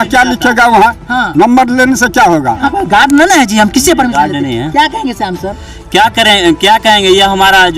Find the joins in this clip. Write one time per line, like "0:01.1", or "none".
0:02.6